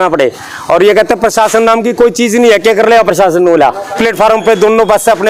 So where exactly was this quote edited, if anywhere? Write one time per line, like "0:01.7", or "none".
0:04.0